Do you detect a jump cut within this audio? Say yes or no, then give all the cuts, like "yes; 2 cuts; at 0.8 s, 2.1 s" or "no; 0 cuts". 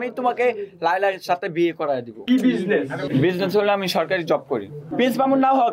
yes; 3 cuts; at 2.2 s, 3.1 s, 4.9 s